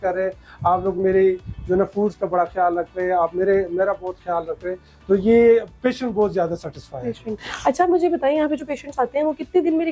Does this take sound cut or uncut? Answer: cut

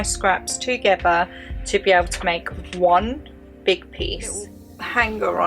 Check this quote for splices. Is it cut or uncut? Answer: cut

